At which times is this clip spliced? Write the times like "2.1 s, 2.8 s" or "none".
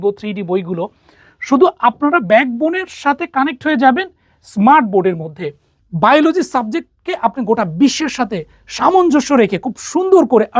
5.7 s